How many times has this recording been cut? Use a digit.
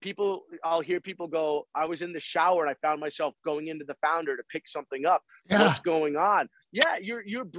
0